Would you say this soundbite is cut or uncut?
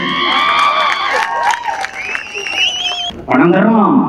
cut